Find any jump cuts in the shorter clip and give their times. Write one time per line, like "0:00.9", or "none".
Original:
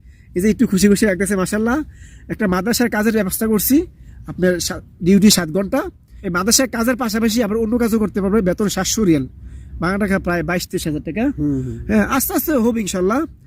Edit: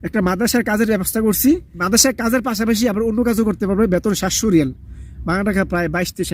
0:01.7